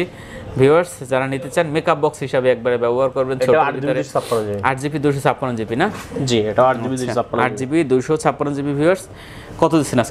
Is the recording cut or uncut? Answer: uncut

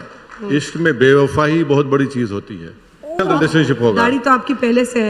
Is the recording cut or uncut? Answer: cut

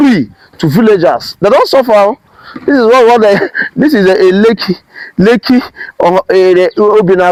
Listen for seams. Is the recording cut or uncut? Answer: uncut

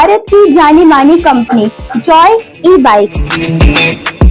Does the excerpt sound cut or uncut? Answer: uncut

